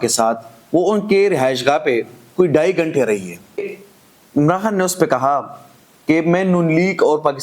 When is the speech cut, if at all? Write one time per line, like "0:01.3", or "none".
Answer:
0:03.7